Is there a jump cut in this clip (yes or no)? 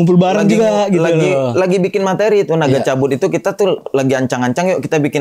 no